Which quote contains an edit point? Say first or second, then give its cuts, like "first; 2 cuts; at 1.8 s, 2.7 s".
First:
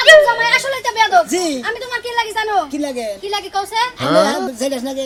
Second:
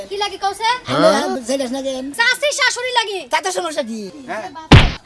second; 1 cut; at 4.1 s